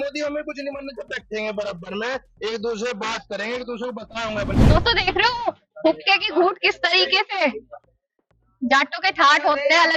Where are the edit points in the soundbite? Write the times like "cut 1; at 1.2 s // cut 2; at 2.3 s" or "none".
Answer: cut 1; at 4.5 s